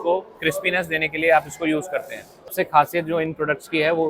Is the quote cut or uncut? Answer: cut